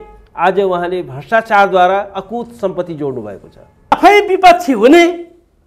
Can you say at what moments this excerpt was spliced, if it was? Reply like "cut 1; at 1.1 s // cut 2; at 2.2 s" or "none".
cut 1; at 3.9 s